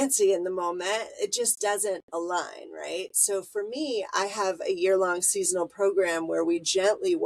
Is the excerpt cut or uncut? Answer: uncut